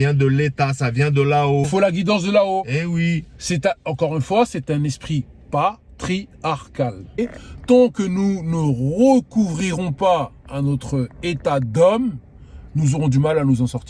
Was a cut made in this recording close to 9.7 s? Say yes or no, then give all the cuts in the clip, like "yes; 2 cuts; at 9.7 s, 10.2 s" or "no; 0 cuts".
no; 2 cuts; at 1.7 s, 7.2 s